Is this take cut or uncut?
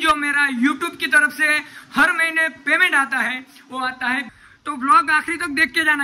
cut